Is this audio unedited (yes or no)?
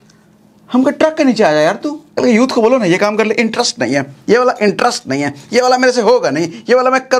no